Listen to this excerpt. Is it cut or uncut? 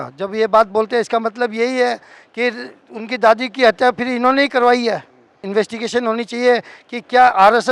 cut